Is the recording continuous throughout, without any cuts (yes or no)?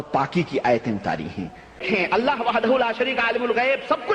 yes